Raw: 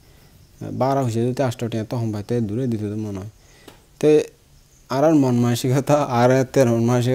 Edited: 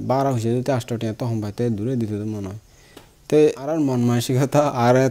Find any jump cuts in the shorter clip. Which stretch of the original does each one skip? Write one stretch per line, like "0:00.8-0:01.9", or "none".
0:04.5-0:05.1